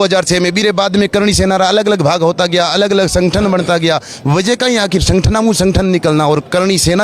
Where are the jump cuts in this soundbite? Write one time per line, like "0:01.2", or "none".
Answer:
none

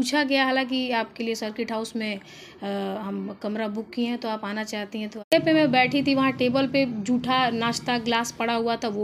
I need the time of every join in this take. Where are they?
0:05.3

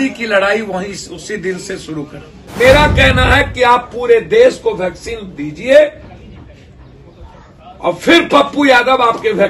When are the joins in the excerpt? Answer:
0:02.4

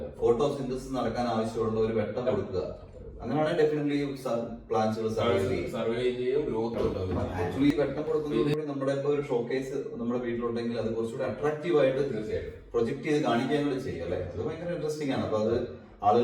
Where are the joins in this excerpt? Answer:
0:07.1

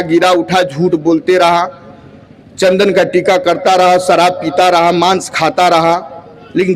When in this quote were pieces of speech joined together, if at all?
none

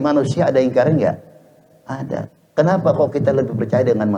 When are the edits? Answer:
none

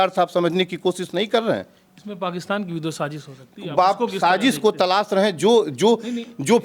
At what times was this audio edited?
none

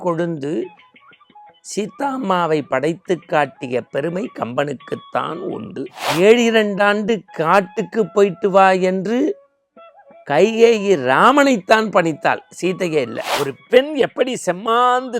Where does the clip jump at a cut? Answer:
0:06.0
0:13.2

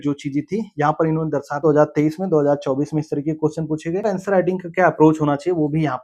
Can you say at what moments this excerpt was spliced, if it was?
0:01.6
0:04.1

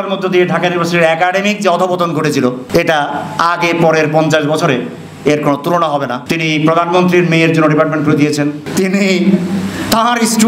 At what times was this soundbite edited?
0:02.6
0:06.2
0:08.6

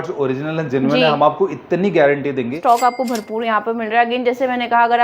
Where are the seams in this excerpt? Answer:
0:02.6

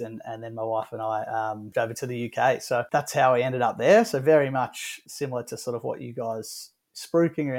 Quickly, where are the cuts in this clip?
0:01.7
0:02.9
0:05.0

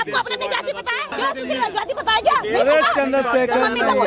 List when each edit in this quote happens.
0:01.1

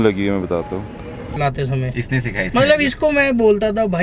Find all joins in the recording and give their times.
0:01.3

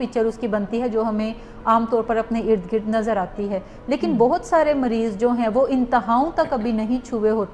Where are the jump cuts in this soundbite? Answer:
none

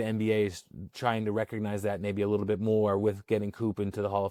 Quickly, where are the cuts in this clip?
none

